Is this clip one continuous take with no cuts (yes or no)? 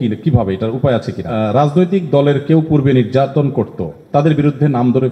no